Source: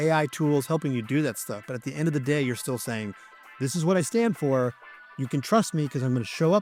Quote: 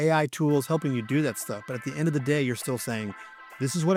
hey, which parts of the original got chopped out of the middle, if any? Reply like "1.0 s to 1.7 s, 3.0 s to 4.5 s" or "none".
none